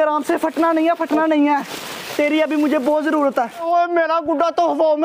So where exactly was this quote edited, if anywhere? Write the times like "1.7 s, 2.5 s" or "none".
3.6 s